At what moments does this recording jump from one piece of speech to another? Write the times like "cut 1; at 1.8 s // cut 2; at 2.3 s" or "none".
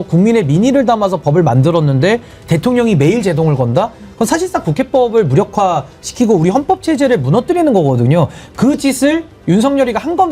none